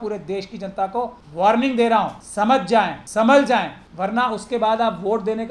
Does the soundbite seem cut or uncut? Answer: cut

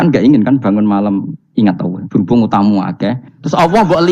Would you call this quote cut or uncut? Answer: uncut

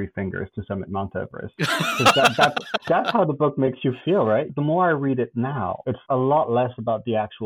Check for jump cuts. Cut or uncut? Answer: cut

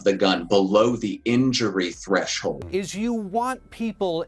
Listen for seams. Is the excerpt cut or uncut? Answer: cut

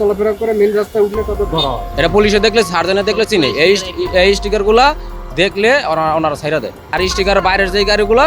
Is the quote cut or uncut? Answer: cut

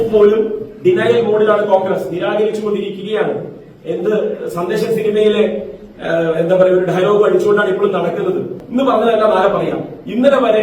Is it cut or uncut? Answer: cut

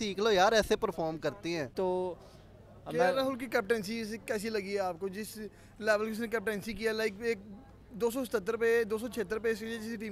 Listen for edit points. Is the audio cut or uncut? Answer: uncut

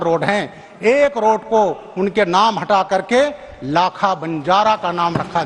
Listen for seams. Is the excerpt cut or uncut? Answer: uncut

